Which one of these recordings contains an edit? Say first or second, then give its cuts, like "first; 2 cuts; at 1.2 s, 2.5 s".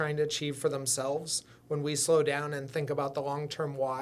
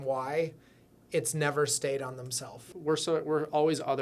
second; 1 cut; at 2.6 s